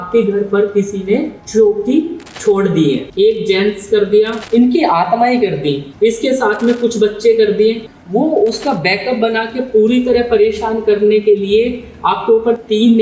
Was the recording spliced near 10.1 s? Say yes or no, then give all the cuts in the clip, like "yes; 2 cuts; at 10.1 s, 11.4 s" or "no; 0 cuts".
no; 6 cuts; at 1.4 s, 2.2 s, 3.1 s, 4.4 s, 5.9 s, 7.9 s